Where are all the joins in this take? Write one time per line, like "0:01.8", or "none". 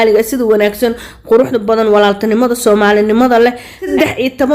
none